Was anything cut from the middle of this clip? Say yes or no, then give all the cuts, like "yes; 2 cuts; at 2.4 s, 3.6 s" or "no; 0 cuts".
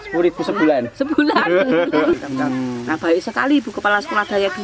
yes; 1 cut; at 2.1 s